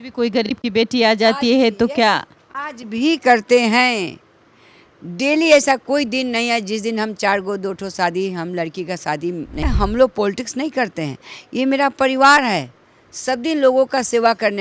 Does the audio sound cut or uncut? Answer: cut